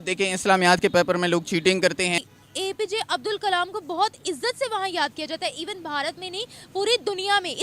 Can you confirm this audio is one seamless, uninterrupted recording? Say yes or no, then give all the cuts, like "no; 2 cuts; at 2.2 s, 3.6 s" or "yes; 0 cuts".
no; 1 cut; at 2.3 s